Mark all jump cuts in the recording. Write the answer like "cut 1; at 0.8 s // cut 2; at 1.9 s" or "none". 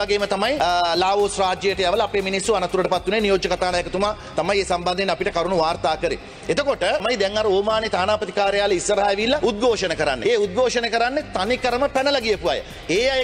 cut 1; at 7.0 s // cut 2; at 9.4 s // cut 3; at 10.2 s